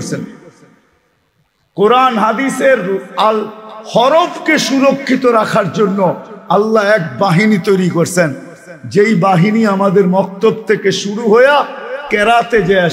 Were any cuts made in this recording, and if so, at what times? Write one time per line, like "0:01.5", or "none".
none